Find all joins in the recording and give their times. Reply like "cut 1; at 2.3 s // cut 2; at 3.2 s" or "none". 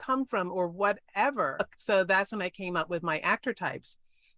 cut 1; at 1.7 s